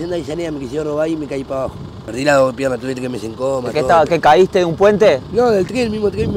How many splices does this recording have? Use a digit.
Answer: 1